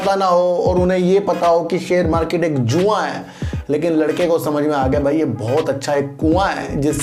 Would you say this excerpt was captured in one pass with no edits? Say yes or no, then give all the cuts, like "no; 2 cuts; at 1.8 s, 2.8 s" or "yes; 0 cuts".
yes; 0 cuts